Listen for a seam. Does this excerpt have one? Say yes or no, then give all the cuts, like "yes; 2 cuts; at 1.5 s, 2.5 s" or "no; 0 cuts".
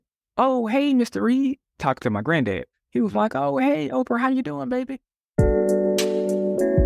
yes; 1 cut; at 5.4 s